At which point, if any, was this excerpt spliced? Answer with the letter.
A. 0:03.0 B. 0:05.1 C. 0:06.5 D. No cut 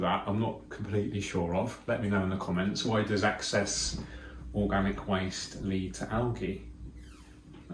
D